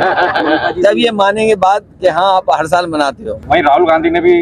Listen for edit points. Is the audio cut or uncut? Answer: cut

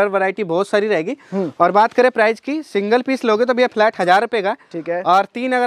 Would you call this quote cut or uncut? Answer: uncut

